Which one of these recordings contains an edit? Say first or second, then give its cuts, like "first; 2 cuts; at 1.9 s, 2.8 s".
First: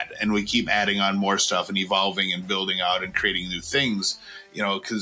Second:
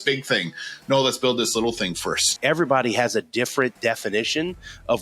second; 1 cut; at 2.4 s